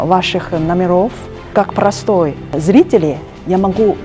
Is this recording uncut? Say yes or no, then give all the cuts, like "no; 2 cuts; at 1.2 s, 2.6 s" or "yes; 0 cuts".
no; 1 cut; at 1.3 s